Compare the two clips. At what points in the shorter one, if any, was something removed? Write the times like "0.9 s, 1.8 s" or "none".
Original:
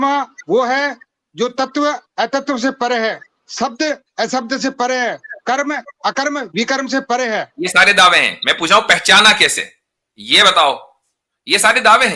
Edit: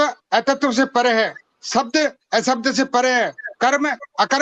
none

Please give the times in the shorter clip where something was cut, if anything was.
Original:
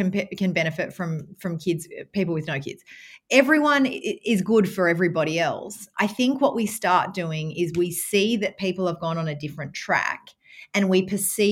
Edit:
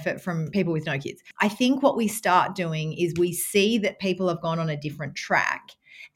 0.9 s

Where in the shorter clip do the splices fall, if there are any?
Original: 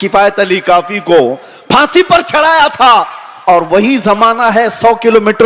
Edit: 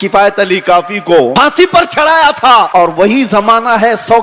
1.3 s, 2.7 s

